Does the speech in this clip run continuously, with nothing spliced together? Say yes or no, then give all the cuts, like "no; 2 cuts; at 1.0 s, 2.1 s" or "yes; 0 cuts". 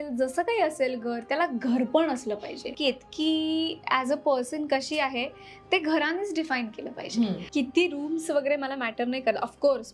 no; 2 cuts; at 2.7 s, 7.4 s